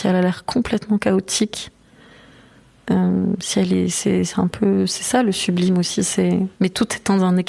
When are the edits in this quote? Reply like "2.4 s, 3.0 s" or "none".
6.5 s